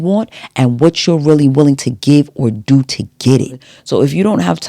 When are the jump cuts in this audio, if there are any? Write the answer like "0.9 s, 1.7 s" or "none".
3.7 s